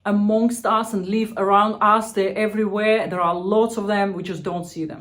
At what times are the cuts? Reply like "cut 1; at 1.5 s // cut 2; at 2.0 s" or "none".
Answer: none